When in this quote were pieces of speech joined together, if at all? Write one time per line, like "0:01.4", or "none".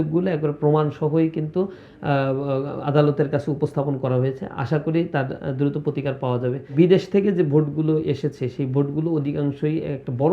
0:06.7